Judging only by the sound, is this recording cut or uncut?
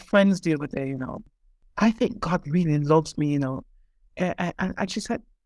cut